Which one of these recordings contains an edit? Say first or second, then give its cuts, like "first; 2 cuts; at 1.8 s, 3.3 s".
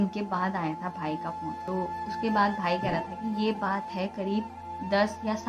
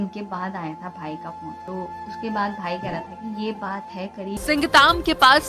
second; 1 cut; at 4.4 s